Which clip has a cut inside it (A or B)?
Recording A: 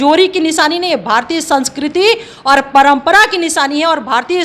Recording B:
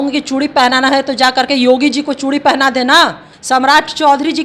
B